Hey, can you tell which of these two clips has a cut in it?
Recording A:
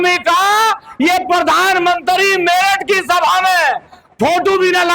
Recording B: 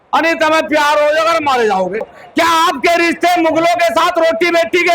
B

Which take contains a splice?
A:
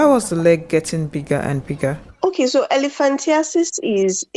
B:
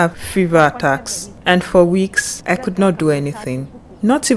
A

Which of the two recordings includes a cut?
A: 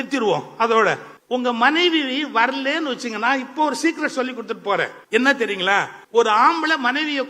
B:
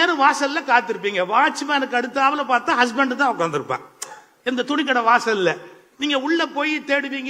A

